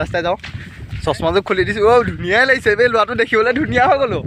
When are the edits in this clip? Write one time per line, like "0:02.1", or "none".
none